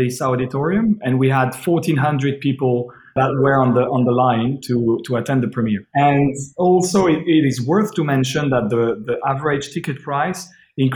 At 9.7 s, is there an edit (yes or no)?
no